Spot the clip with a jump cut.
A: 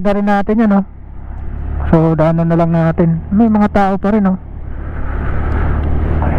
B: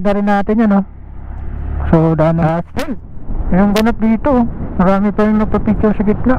B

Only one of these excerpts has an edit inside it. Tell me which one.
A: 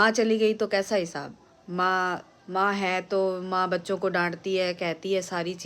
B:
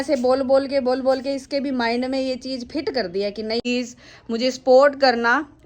B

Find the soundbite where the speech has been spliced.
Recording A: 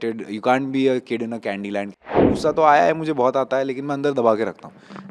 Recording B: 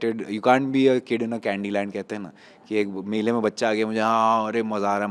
A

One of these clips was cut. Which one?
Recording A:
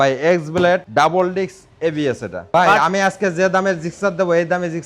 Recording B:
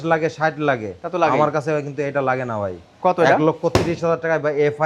A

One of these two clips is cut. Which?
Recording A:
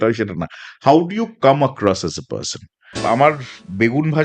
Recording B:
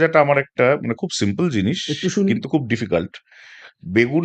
A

